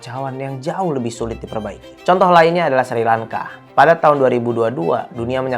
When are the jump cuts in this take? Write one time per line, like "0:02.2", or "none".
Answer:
none